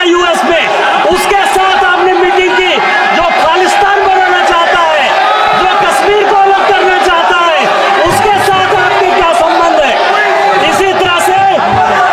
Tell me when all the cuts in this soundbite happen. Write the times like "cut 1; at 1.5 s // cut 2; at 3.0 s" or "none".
none